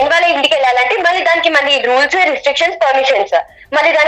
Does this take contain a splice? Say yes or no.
no